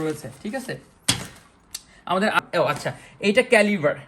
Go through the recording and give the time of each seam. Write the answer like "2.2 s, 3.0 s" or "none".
2.4 s